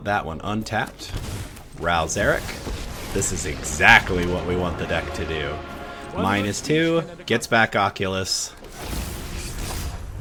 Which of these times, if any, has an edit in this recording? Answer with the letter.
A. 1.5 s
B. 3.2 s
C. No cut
C